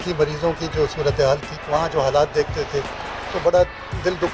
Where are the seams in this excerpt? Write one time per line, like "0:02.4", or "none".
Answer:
0:01.5